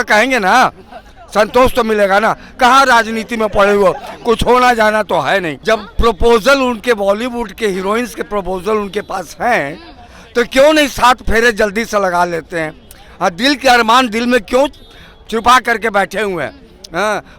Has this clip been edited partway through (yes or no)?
yes